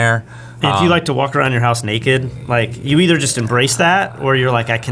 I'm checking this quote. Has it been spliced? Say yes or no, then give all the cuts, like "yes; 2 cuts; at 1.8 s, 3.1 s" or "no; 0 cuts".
no; 0 cuts